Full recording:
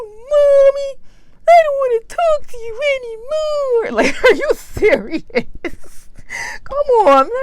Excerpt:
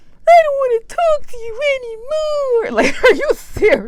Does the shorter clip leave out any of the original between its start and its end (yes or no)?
no